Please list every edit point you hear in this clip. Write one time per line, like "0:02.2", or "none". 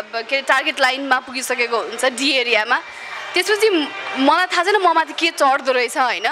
none